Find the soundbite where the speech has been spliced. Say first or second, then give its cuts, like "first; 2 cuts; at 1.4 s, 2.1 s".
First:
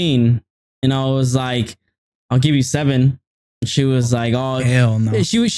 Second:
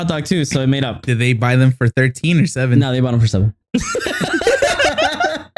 second; 1 cut; at 1.0 s